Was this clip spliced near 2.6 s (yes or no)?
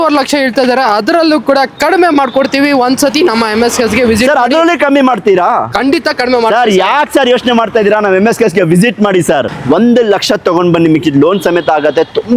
no